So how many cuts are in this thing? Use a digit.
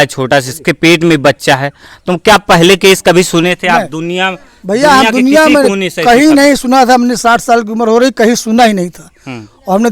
0